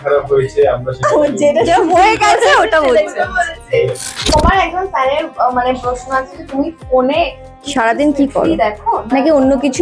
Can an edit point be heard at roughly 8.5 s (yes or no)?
no